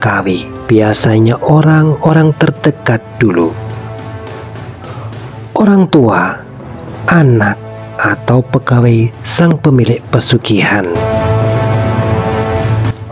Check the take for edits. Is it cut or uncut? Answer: uncut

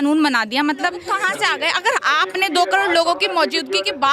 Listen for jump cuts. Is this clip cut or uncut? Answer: cut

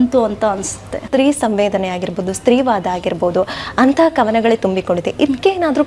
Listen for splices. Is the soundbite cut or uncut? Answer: cut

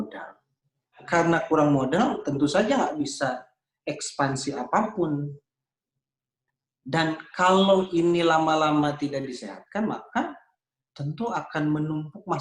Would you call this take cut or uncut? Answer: cut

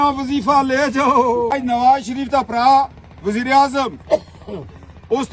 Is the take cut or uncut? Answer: cut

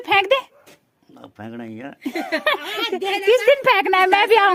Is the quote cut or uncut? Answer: uncut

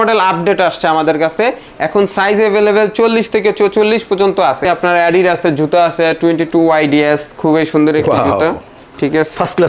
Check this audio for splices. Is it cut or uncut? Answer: cut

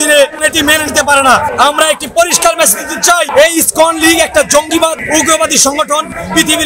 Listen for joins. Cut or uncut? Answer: uncut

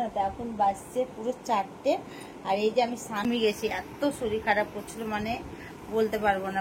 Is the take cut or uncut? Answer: cut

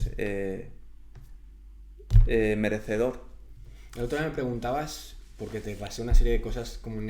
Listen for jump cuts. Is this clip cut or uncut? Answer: uncut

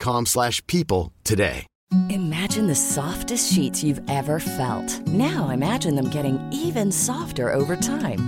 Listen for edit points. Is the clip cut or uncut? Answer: cut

